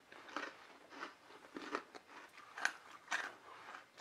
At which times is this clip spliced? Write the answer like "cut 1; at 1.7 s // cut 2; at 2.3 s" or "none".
cut 1; at 2.3 s